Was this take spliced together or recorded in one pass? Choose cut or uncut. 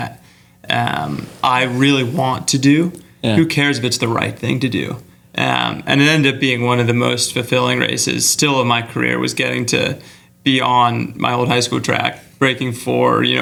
uncut